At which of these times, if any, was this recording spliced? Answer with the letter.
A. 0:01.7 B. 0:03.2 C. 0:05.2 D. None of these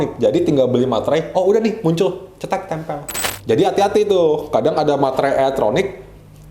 B